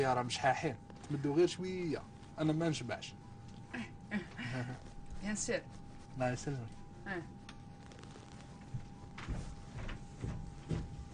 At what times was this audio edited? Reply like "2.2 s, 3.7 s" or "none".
4.3 s